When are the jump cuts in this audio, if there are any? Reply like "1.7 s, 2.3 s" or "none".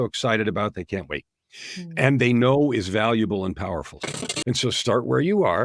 4.1 s